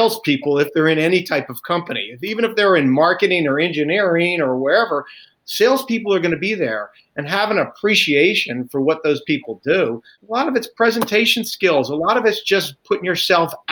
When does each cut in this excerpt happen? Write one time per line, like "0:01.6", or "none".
0:10.0